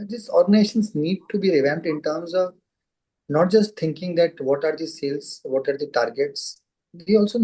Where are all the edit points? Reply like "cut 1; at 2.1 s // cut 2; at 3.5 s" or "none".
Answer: none